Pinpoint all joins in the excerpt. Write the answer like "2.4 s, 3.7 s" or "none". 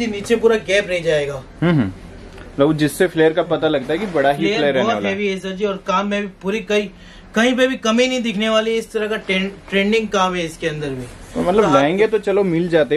none

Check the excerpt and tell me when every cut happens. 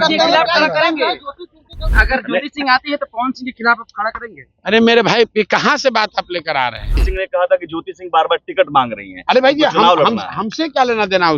1.9 s, 7.0 s

